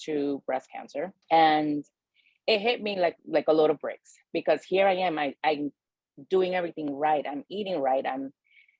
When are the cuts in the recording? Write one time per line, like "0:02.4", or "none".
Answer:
0:01.2